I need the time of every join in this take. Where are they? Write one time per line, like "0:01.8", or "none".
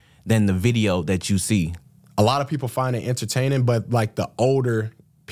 0:01.8